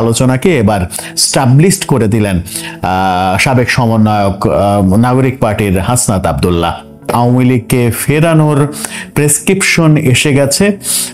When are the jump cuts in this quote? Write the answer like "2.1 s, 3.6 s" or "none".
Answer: 7.1 s